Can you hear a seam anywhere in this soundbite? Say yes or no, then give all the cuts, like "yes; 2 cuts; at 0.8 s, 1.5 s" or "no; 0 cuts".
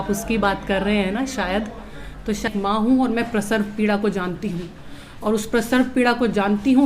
yes; 1 cut; at 2.5 s